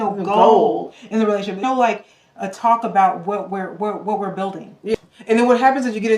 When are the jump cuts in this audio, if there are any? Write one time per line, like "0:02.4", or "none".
0:01.6
0:04.9